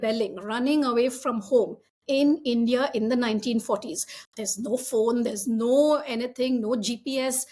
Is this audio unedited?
yes; 0 cuts

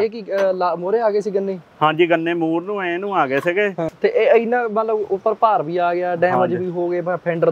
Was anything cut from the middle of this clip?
yes; 1 cut; at 3.9 s

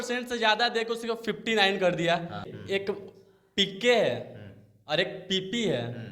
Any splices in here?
yes; 1 cut; at 2.5 s

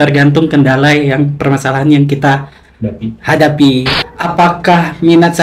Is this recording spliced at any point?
yes; 1 cut; at 4.0 s

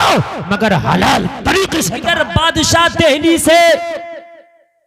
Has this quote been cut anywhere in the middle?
yes; 1 cut; at 2.0 s

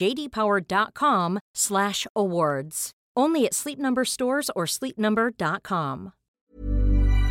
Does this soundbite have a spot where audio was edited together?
yes; 1 cut; at 6.3 s

